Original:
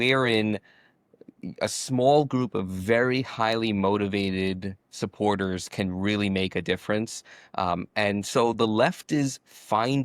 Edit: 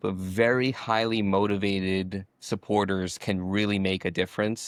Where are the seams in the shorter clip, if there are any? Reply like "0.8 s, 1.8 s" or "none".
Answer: none